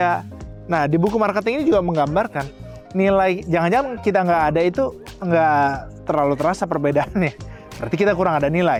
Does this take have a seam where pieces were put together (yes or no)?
no